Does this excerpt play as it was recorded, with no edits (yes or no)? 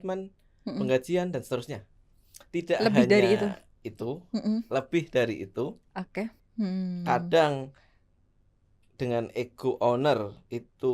no